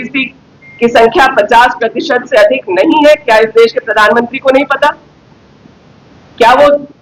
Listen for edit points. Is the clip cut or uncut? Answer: uncut